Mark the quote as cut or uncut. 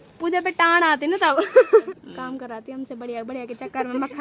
cut